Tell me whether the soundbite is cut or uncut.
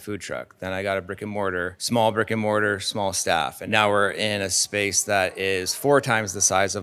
cut